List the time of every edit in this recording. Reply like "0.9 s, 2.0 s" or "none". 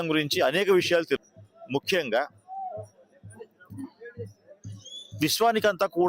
1.2 s